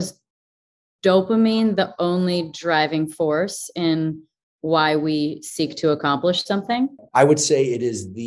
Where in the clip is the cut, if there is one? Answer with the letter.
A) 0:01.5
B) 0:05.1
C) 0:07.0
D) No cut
C